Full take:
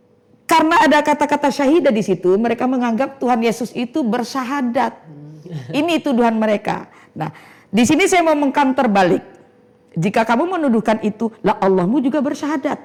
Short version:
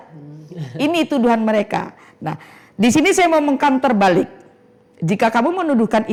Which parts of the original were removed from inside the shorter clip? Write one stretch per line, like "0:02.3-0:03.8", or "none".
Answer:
none